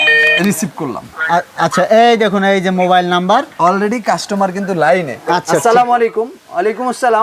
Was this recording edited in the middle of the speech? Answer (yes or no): no